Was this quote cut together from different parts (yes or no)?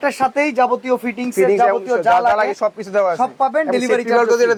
no